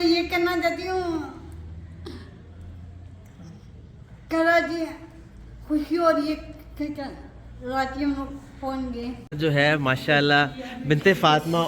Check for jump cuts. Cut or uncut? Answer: cut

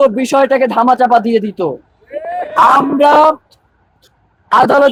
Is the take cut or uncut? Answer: uncut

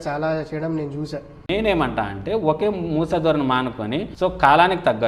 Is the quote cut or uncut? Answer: cut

